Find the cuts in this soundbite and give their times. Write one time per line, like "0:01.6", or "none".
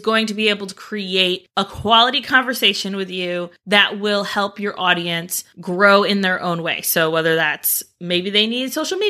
none